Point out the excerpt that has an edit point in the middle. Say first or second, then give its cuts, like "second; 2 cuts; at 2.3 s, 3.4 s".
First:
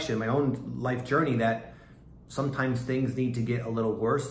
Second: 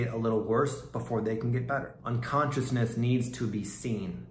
second; 1 cut; at 1.9 s